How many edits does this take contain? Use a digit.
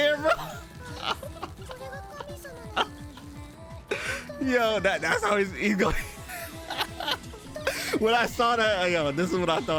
0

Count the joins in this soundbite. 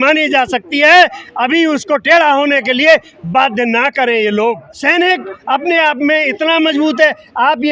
1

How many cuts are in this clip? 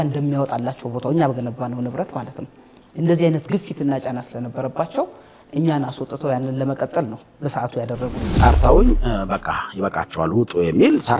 1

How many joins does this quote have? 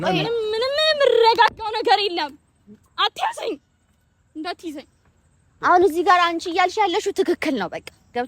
1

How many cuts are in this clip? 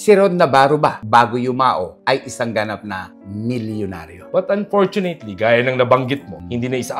1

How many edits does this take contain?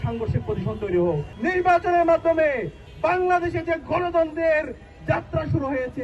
1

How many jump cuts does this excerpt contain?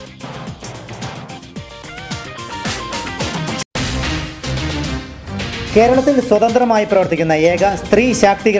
1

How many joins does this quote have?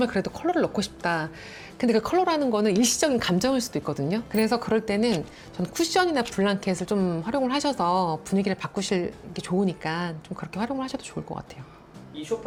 0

